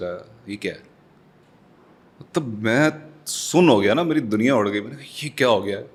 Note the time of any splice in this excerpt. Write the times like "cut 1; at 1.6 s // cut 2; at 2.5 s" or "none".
none